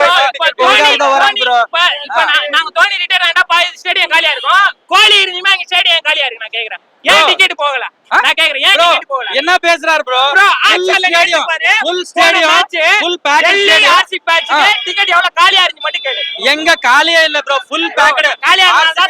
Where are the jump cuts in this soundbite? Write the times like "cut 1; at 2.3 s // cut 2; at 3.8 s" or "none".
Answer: none